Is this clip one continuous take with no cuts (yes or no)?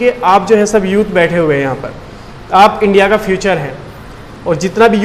yes